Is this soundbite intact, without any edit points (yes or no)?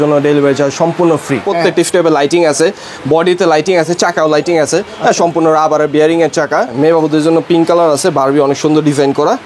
no